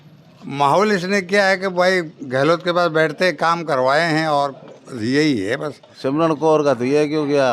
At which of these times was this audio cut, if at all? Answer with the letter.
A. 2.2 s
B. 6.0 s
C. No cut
B